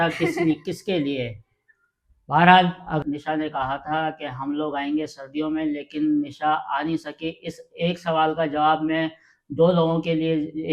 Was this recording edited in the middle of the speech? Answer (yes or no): yes